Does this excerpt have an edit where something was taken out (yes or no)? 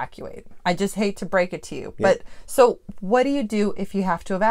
no